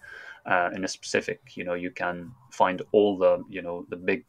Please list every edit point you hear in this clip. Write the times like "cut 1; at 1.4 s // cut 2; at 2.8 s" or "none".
none